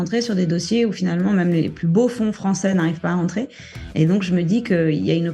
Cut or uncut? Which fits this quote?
cut